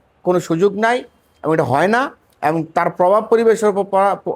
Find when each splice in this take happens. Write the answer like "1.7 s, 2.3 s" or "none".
none